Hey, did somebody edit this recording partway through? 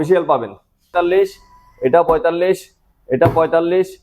yes; 1 cut; at 0.9 s

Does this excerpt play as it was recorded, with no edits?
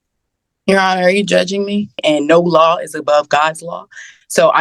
no; 1 cut; at 2.0 s

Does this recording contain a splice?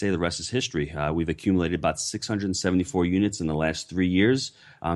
no; 0 cuts

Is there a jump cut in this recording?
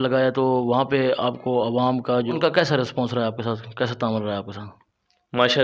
yes; 1 cut; at 2.4 s

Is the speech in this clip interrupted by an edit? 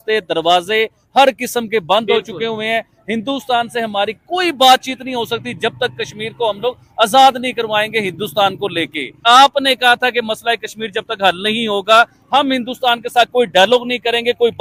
yes; 1 cut; at 9.1 s

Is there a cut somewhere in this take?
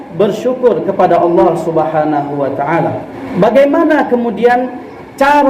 yes; 1 cut; at 3.1 s

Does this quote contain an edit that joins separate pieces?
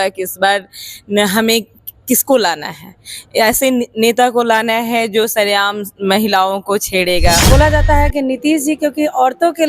yes; 1 cut; at 7.5 s

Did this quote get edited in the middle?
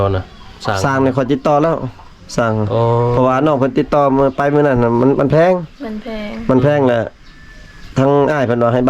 no; 0 cuts

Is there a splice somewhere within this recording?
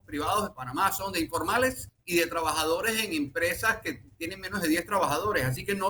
no; 0 cuts

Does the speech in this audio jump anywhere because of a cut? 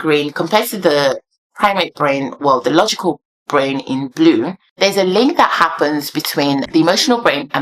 yes; 2 cuts; at 4.6 s, 6.7 s

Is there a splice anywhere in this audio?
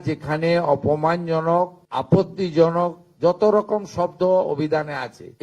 yes; 1 cut; at 1.8 s

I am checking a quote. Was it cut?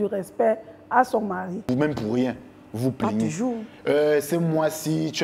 yes; 1 cut; at 1.6 s

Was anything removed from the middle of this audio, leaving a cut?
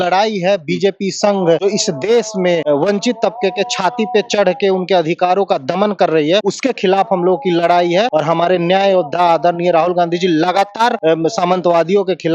yes; 5 cuts; at 1.6 s, 2.6 s, 6.5 s, 8.1 s, 11.0 s

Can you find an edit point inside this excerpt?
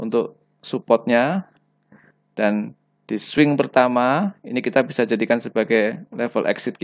no; 0 cuts

